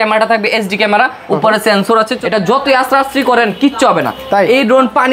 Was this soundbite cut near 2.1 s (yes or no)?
yes